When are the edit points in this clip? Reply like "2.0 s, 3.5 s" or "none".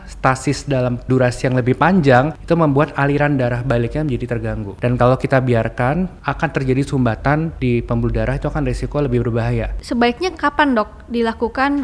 1.1 s, 2.4 s, 4.7 s, 6.2 s, 7.5 s, 9.8 s